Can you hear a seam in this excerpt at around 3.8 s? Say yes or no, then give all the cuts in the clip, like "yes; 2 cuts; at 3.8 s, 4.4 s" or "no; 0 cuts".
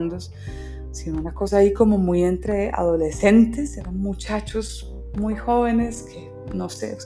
yes; 1 cut; at 3.8 s